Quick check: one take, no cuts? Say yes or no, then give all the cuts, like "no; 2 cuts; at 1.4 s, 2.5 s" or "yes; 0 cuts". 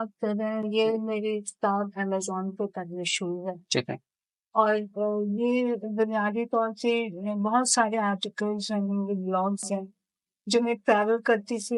yes; 0 cuts